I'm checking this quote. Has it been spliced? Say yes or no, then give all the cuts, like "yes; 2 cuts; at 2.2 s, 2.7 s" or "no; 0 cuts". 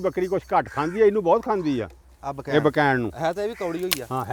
no; 0 cuts